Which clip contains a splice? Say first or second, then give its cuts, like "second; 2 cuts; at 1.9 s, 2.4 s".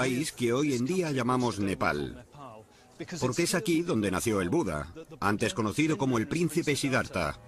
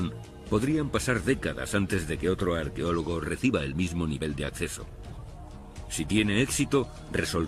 first; 1 cut; at 3.3 s